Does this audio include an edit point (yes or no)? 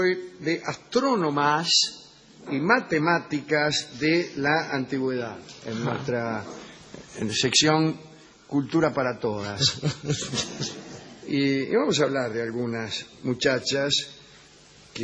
no